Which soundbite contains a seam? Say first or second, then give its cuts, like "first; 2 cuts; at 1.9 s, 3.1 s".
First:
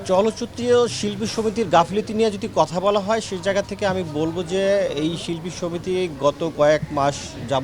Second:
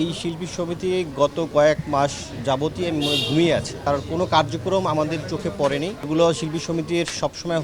second; 2 cuts; at 3.8 s, 6.0 s